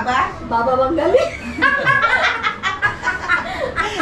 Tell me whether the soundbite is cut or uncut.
uncut